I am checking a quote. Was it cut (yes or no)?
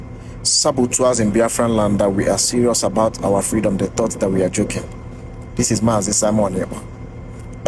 no